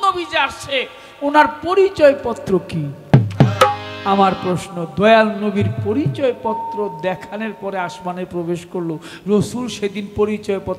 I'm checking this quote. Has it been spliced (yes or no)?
no